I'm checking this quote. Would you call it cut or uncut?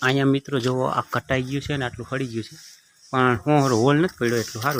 uncut